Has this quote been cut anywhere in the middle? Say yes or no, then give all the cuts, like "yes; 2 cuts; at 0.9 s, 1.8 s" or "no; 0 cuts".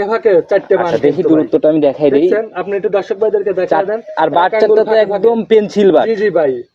no; 0 cuts